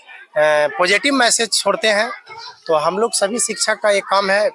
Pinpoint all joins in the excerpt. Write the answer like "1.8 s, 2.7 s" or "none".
none